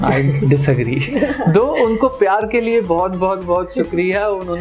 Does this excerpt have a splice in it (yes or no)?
no